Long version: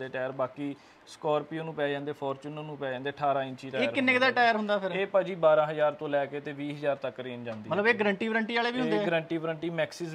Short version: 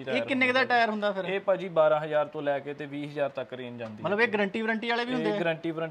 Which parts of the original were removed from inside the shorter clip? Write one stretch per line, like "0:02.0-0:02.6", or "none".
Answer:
none